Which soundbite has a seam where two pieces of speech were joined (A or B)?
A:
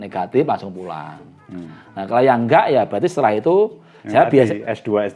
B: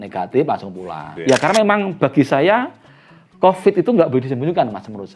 B